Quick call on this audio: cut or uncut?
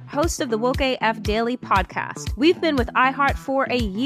uncut